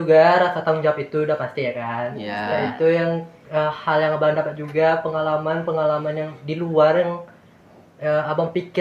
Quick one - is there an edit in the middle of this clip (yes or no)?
no